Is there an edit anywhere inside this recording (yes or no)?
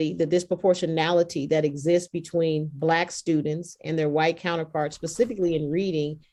no